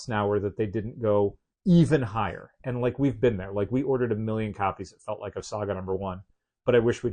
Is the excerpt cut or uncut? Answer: cut